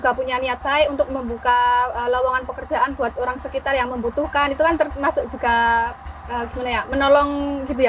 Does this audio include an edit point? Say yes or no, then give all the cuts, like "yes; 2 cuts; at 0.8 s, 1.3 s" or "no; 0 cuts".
no; 0 cuts